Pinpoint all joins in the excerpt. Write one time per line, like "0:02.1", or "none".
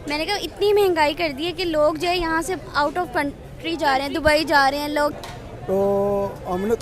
0:05.2